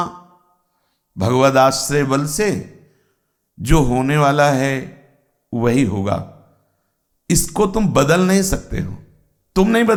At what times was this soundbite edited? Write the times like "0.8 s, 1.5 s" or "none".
none